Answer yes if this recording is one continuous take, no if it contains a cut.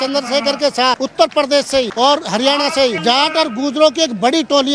no